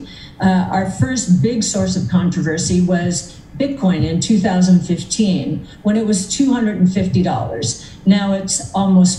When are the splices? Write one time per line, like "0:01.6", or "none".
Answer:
none